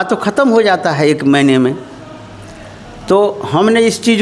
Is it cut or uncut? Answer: uncut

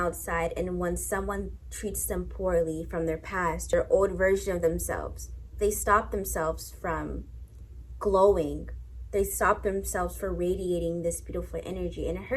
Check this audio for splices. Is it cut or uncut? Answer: cut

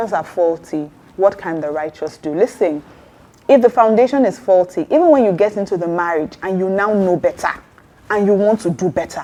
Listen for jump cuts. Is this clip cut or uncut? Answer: uncut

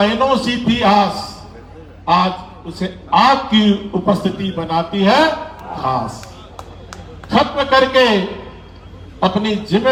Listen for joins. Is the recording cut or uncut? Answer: uncut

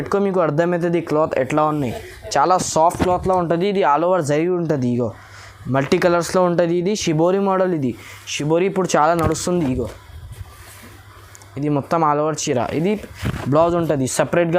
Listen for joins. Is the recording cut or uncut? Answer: uncut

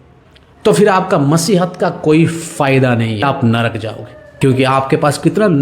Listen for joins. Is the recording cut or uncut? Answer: cut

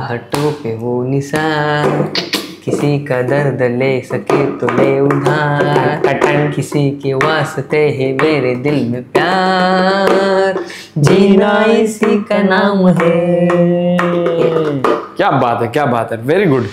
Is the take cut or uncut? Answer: uncut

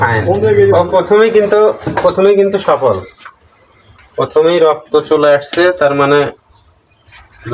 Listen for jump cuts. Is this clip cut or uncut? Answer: uncut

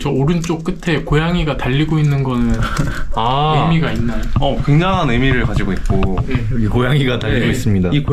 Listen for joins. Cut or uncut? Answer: uncut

